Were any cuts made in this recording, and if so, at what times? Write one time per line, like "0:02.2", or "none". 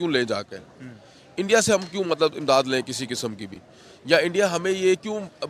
none